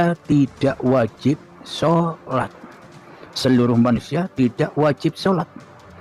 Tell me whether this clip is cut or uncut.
uncut